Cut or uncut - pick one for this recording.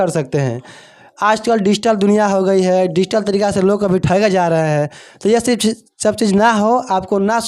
uncut